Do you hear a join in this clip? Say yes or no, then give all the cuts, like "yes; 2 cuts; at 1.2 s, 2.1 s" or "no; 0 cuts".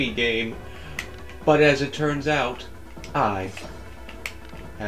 no; 0 cuts